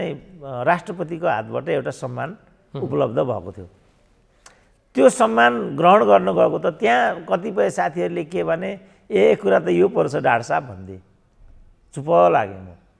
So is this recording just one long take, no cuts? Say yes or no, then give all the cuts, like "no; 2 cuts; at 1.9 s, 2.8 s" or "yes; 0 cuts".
yes; 0 cuts